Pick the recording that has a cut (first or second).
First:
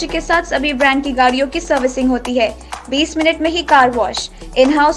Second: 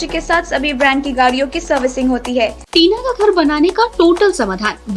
second